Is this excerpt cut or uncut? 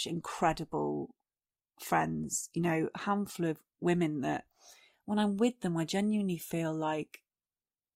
uncut